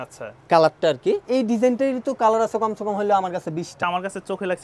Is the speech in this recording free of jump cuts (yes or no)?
no